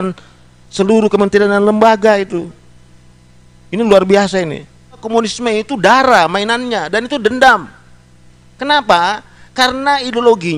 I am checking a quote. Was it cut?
yes; 1 cut; at 5.0 s

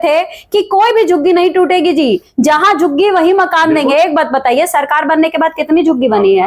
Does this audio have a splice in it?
no; 0 cuts

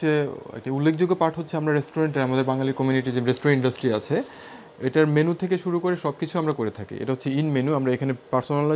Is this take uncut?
yes; 0 cuts

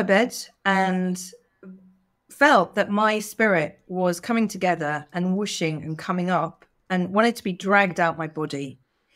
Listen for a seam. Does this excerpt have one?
no; 0 cuts

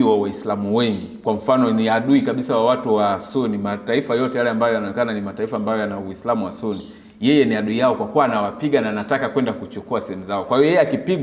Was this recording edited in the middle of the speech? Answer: no; 0 cuts

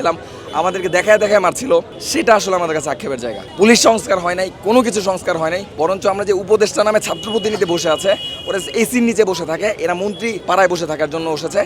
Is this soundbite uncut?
no; 4 cuts; at 2.0 s, 3.4 s, 5.6 s, 10.4 s

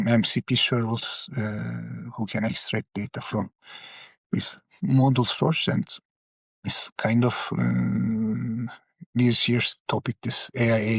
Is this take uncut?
yes; 0 cuts

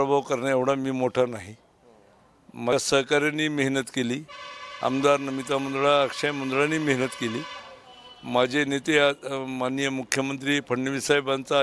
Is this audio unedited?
no; 1 cut; at 2.7 s

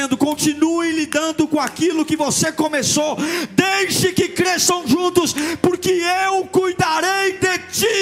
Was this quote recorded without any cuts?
yes; 0 cuts

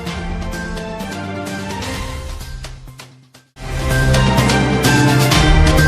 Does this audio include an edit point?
no; 0 cuts

